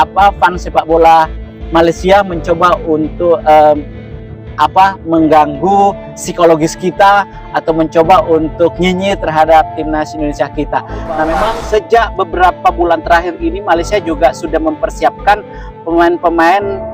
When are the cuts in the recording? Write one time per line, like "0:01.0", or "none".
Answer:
0:11.4

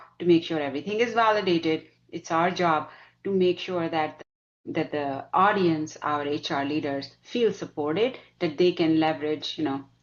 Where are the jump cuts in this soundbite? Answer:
none

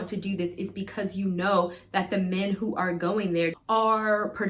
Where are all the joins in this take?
0:03.6

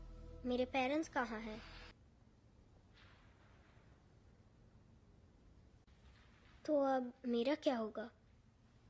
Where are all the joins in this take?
0:02.0

